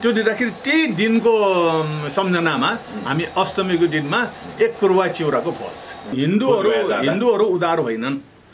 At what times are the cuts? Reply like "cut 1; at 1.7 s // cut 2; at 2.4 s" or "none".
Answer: cut 1; at 6.1 s

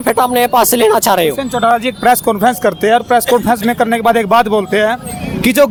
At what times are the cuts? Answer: none

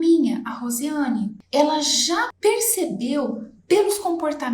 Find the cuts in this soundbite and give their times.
cut 1; at 1.4 s // cut 2; at 2.3 s

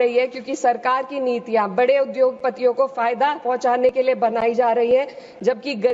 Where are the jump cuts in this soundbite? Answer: none

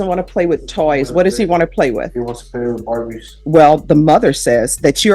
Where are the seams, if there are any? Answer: cut 1; at 3.3 s

